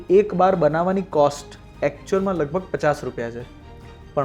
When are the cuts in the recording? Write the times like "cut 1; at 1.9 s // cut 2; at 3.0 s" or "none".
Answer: none